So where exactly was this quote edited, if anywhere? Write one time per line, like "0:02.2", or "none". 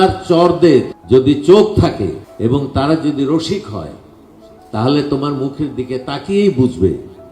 0:01.0
0:02.2